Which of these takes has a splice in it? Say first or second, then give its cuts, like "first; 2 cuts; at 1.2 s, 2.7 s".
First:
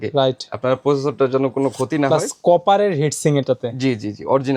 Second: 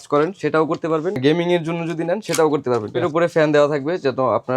second; 2 cuts; at 1.2 s, 2.9 s